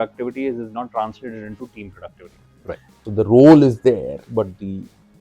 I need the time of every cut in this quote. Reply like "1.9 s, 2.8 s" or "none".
3.0 s